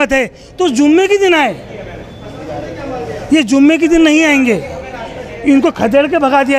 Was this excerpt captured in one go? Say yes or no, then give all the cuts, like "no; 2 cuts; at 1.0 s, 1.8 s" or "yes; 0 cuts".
yes; 0 cuts